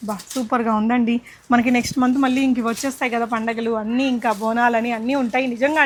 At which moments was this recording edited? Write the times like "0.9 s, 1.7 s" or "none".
none